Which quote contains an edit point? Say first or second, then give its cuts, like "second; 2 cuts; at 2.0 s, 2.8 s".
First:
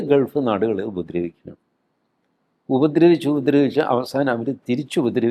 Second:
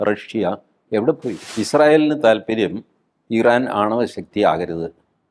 second; 1 cut; at 1.5 s